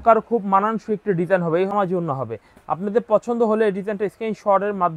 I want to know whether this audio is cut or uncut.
cut